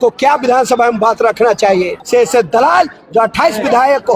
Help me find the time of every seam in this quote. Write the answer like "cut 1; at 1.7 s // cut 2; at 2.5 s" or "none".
cut 1; at 2.0 s